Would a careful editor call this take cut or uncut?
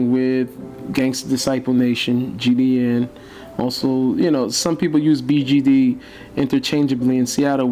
uncut